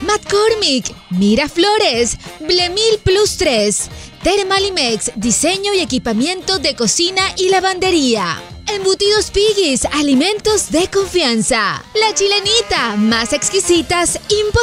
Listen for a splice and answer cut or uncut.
uncut